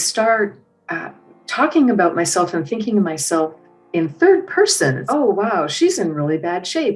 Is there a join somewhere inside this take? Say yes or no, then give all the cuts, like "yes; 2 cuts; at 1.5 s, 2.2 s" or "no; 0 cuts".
yes; 1 cut; at 5.0 s